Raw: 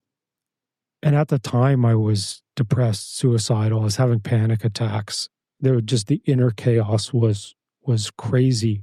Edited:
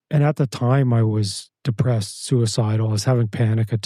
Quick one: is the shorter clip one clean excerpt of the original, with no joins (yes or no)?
yes